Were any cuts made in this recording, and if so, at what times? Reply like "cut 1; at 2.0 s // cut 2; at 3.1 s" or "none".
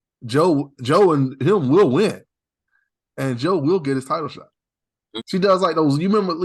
cut 1; at 5.0 s